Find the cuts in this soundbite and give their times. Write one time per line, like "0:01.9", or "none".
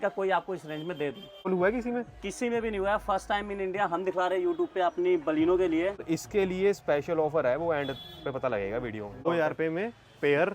0:01.5
0:06.0
0:09.3